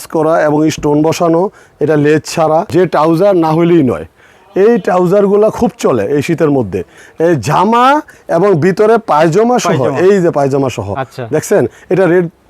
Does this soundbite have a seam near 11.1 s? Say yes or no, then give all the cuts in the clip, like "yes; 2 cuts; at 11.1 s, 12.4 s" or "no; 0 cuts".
no; 2 cuts; at 2.7 s, 7.0 s